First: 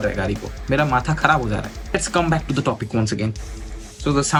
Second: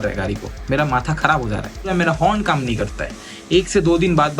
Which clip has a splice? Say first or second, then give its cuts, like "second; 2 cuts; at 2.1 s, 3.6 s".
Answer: second; 1 cut; at 1.9 s